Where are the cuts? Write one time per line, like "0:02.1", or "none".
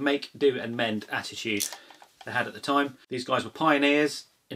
0:03.0